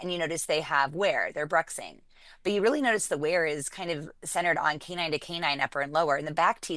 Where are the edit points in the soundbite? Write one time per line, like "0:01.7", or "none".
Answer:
none